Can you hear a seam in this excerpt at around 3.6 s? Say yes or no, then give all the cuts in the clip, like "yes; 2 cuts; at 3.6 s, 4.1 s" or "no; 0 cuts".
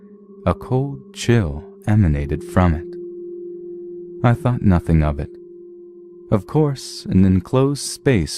yes; 1 cut; at 3.6 s